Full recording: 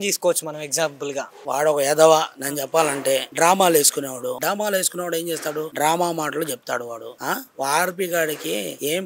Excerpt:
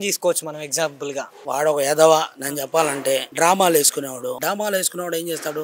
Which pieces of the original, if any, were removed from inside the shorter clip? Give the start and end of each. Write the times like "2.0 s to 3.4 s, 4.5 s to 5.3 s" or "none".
none